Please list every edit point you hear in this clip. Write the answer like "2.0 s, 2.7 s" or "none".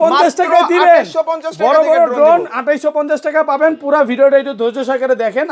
none